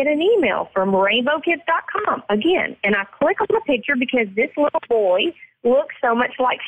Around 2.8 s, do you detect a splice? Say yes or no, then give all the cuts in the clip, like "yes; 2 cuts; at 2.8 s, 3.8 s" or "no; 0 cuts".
no; 0 cuts